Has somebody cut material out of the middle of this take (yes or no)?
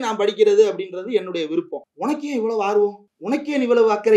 yes